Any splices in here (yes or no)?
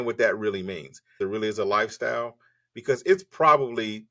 yes